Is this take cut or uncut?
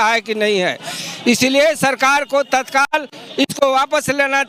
uncut